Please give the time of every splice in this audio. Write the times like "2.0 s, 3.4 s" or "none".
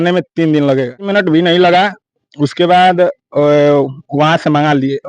1.1 s